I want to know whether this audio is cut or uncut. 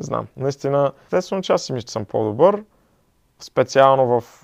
cut